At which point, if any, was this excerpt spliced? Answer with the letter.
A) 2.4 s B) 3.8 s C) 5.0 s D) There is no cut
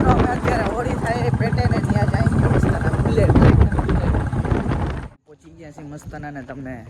C